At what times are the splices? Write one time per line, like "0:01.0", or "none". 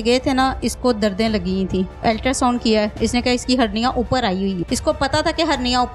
0:02.0
0:04.6